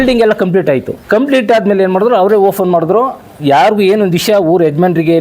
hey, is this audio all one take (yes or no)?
no